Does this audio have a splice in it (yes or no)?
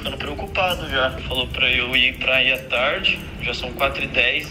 no